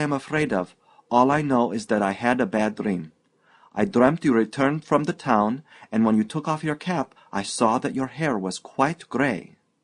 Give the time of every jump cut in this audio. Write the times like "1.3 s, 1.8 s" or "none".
none